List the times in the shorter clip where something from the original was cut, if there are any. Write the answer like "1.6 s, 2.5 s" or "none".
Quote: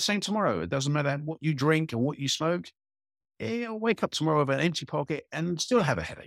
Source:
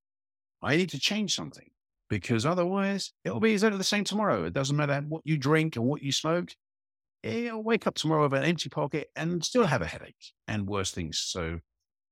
none